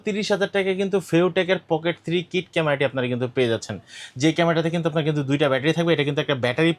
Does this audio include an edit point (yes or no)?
no